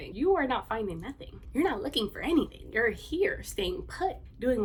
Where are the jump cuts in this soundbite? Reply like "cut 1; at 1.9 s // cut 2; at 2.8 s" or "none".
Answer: none